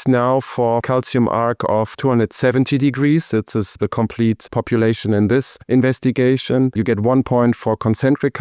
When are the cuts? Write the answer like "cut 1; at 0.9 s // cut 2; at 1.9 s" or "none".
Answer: cut 1; at 0.8 s // cut 2; at 1.9 s // cut 3; at 3.7 s // cut 4; at 5.6 s // cut 5; at 6.8 s